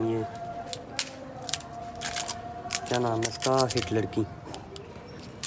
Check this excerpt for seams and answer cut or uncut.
uncut